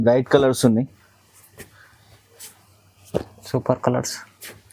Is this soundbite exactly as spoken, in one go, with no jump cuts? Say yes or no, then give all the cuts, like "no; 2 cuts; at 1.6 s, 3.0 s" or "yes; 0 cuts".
yes; 0 cuts